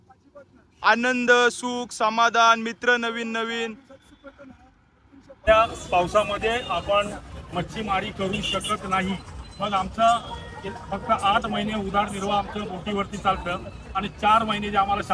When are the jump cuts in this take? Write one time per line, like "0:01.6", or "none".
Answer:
0:05.5

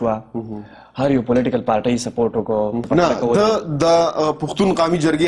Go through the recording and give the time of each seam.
0:02.8

